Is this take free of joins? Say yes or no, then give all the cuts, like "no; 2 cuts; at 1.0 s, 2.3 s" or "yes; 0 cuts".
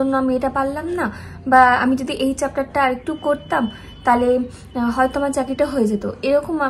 yes; 0 cuts